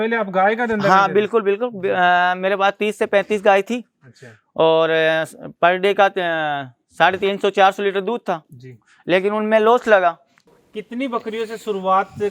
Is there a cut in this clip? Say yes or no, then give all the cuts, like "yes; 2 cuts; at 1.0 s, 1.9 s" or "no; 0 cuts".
yes; 1 cut; at 10.4 s